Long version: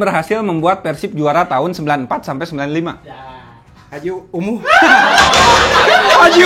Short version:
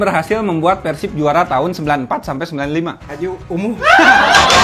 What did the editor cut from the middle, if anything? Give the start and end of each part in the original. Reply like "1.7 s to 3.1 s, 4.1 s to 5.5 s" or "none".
3.0 s to 3.9 s